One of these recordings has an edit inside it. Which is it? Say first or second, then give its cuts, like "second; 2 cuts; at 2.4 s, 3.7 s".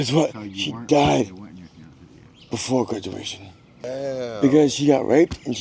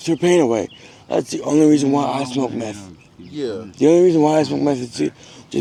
first; 1 cut; at 3.9 s